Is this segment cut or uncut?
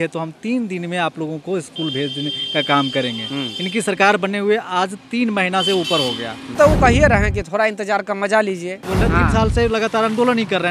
cut